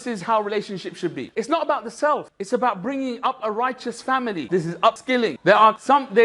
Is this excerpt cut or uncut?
cut